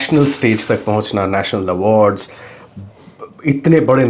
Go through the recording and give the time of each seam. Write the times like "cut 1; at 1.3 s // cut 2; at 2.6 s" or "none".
none